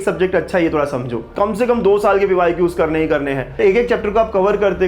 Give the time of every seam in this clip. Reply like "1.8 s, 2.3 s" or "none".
1.2 s, 3.6 s